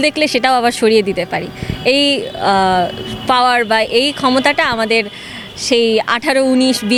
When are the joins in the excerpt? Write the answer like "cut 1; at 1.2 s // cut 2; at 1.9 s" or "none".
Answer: none